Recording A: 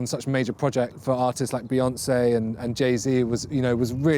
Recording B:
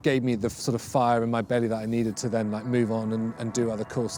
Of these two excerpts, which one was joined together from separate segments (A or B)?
A